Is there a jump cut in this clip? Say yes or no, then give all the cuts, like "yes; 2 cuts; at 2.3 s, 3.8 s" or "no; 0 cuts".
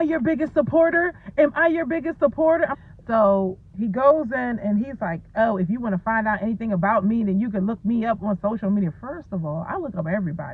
yes; 1 cut; at 2.8 s